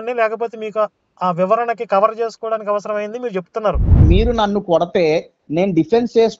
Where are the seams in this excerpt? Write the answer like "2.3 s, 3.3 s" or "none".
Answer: 4.0 s